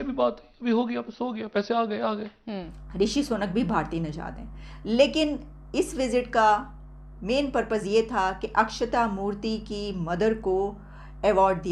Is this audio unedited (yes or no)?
no